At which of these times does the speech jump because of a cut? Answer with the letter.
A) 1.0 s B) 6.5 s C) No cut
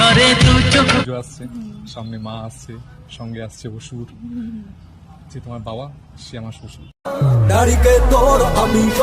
A